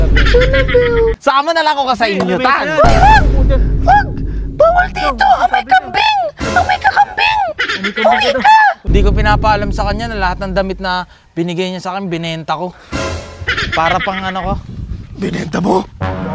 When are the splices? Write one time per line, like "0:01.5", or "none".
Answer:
0:01.2
0:08.8